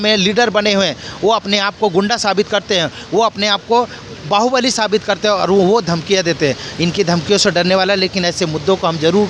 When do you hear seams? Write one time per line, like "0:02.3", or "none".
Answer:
none